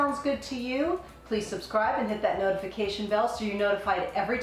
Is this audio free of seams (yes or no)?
yes